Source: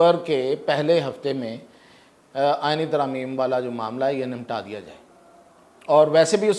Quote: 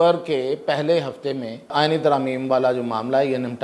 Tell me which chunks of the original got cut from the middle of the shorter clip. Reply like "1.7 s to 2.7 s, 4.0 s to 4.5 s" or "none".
1.7 s to 2.6 s